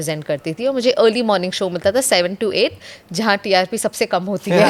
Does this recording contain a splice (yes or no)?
no